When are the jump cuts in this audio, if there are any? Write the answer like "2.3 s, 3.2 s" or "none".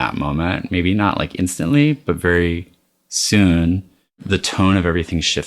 4.2 s